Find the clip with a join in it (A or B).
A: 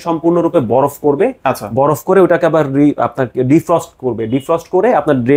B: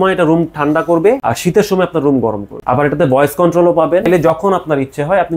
B